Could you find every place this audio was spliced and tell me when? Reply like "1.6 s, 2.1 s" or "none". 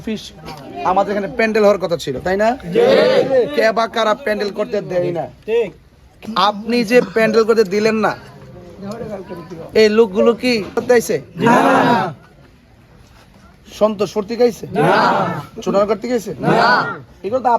6.2 s, 10.8 s

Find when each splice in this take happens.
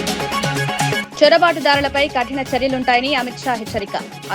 none

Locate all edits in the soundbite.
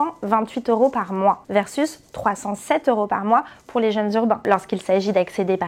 4.4 s

